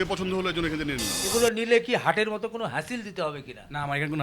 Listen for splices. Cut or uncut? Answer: cut